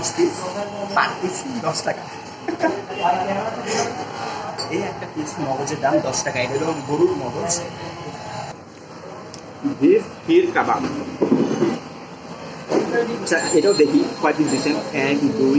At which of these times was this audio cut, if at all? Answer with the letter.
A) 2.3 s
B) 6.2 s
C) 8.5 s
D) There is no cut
C